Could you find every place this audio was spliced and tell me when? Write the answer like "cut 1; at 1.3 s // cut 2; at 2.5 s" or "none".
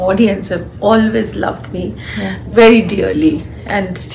none